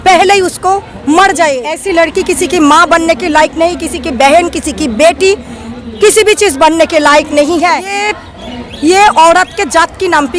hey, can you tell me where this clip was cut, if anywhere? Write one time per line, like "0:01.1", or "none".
0:01.8
0:08.1